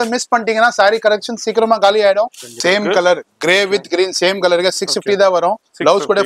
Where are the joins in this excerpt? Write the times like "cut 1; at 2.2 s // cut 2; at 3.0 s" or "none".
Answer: cut 1; at 2.5 s